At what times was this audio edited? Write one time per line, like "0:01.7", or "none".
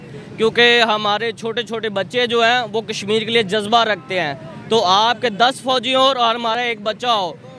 none